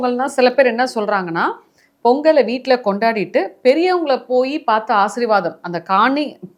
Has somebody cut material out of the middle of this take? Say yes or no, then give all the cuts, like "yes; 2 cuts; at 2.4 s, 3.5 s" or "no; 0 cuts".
no; 0 cuts